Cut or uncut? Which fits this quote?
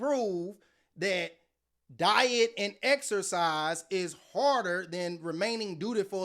uncut